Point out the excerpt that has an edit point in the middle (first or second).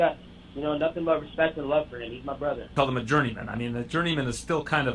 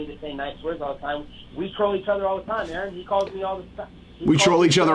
first